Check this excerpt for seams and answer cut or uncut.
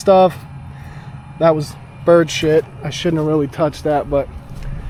uncut